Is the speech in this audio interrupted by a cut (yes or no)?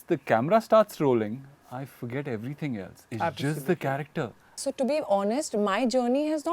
yes